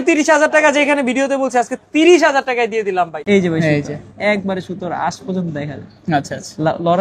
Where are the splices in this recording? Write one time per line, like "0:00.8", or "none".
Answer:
0:03.2